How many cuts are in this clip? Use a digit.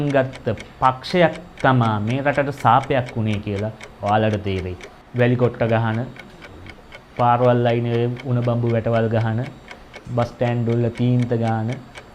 1